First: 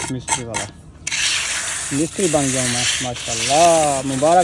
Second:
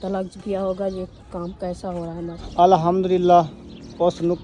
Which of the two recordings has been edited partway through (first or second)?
second